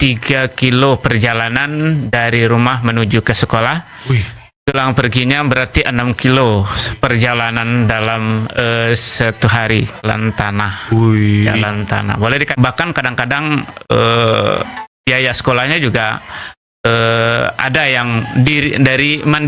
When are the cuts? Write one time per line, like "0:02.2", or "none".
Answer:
0:04.7
0:10.0
0:12.5